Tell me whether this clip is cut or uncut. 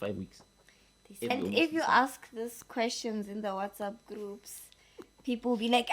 cut